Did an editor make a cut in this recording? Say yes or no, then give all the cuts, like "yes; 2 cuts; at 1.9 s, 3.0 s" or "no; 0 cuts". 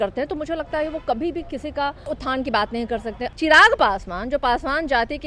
yes; 2 cuts; at 2.1 s, 3.2 s